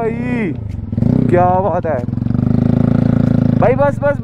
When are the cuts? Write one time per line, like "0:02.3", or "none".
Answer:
none